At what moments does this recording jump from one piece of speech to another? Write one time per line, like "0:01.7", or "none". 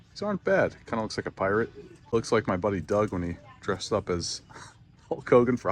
0:02.1